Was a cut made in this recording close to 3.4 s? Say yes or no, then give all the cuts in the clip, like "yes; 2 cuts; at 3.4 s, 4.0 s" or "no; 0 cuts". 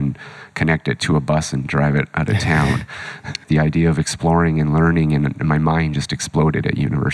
yes; 1 cut; at 3.4 s